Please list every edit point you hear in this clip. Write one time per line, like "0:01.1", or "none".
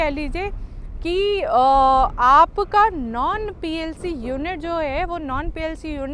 none